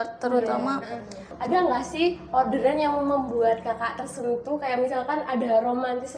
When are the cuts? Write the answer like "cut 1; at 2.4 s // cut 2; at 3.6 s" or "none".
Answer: cut 1; at 1.2 s